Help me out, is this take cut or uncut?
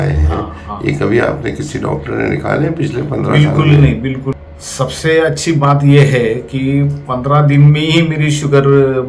cut